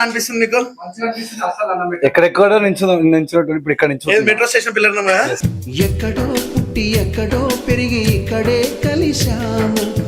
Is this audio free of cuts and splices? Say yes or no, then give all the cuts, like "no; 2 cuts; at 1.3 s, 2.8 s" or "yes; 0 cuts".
yes; 0 cuts